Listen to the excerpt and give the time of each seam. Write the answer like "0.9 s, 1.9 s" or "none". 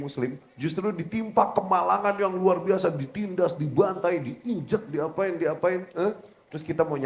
none